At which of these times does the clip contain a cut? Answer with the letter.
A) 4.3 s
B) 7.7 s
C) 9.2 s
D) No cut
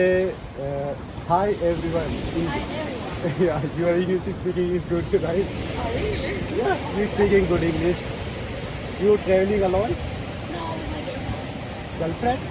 D